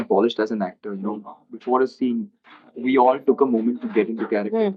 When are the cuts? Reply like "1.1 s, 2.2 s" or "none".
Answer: none

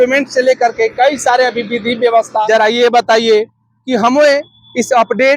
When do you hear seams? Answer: 2.4 s

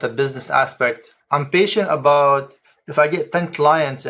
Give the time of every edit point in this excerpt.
1.1 s

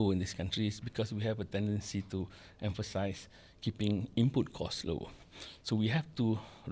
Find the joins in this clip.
none

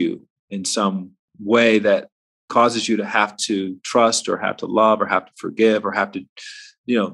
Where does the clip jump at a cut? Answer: 1.3 s

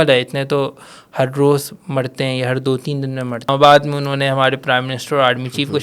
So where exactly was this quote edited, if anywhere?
3.5 s

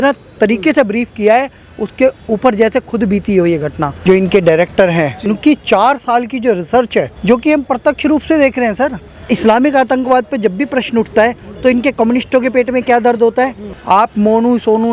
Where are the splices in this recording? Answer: 3.9 s, 5.2 s, 7.1 s, 9.3 s, 13.7 s

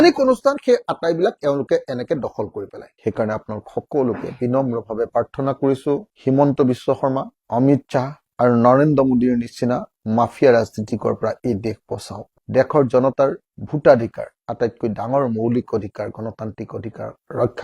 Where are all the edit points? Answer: 2.9 s, 6.1 s, 12.3 s

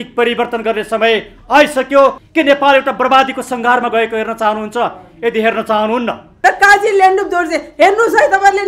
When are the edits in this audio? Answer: 2.2 s, 6.2 s

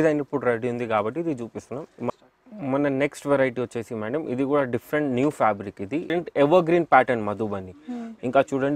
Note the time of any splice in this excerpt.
2.1 s, 6.1 s

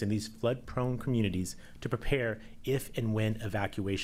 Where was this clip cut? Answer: none

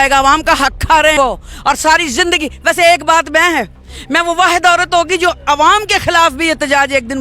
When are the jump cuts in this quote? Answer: 1.1 s

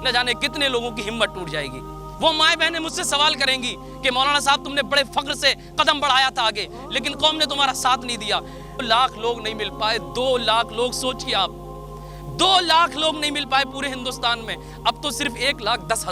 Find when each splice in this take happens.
2.0 s, 8.8 s

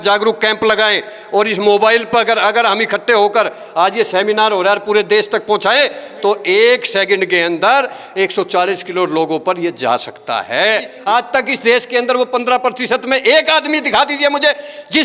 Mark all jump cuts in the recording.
10.9 s

